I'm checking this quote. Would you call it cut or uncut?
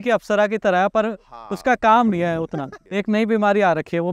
cut